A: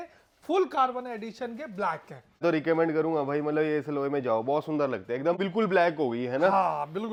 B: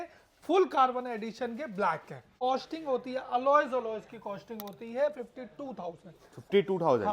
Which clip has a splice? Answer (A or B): B